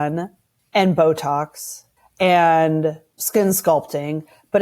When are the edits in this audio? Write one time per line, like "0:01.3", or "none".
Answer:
0:03.1